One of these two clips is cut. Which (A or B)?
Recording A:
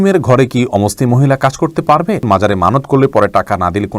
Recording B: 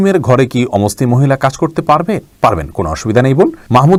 A